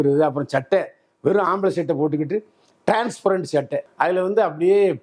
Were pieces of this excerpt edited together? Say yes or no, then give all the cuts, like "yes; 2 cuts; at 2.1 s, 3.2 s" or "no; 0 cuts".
no; 0 cuts